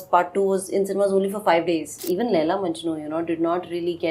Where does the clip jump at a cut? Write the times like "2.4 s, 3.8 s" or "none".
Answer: 1.9 s

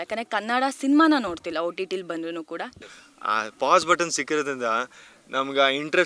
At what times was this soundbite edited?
2.8 s

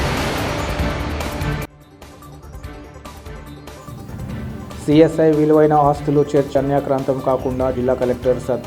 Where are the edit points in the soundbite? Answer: 1.5 s

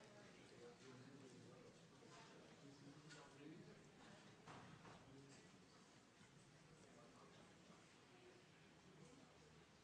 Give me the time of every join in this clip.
none

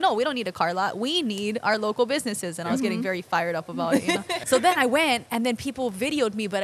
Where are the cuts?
4.4 s

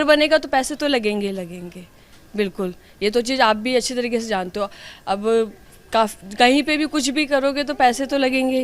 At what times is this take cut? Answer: none

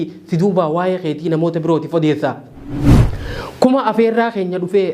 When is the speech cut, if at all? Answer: 2.9 s

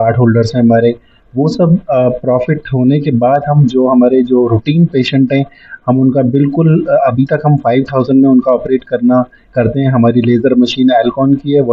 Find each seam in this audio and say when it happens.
none

